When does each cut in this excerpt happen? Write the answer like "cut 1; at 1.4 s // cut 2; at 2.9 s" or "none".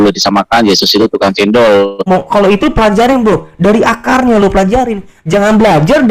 cut 1; at 2.1 s

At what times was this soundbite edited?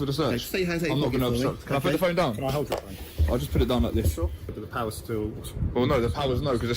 cut 1; at 4.4 s

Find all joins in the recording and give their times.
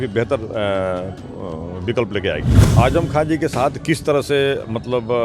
cut 1; at 2.5 s

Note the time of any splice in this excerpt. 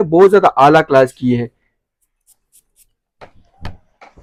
none

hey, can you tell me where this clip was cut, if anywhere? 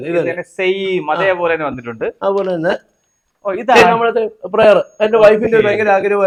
none

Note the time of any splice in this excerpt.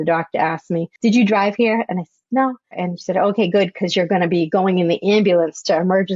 cut 1; at 0.9 s // cut 2; at 2.8 s

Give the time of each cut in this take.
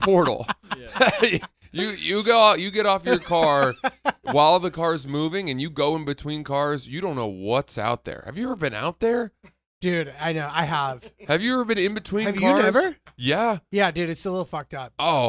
none

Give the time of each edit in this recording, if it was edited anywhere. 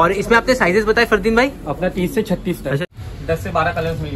cut 1; at 2.8 s

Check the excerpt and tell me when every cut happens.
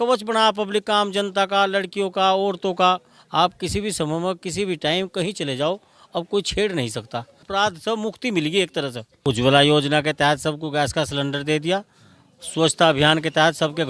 cut 1; at 7.4 s // cut 2; at 9.1 s

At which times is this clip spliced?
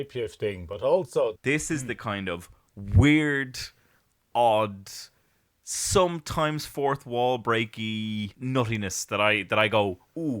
cut 1; at 1.4 s // cut 2; at 8.3 s

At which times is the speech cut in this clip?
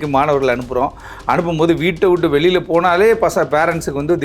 none

